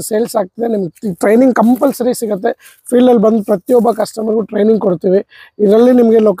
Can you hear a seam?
no; 0 cuts

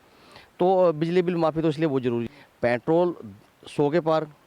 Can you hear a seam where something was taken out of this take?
yes; 1 cut; at 2.2 s

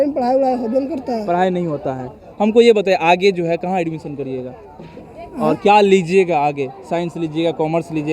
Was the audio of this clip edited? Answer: no; 0 cuts

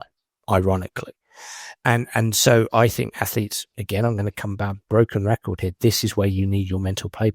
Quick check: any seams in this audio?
no; 0 cuts

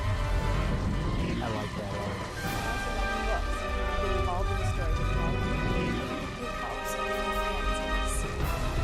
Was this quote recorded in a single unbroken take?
yes; 0 cuts

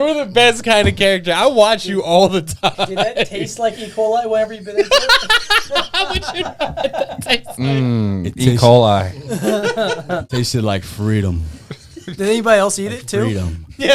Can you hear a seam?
yes; 1 cut; at 10.3 s

